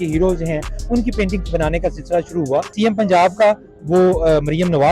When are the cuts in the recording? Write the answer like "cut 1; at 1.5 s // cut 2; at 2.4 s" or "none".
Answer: cut 1; at 2.7 s